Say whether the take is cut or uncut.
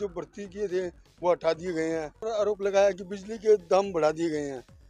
cut